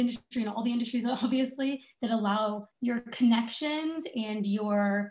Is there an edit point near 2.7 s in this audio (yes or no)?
yes